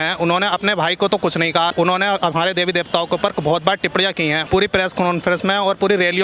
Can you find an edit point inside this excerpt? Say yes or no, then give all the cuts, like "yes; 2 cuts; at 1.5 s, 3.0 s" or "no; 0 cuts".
yes; 2 cuts; at 1.7 s, 4.4 s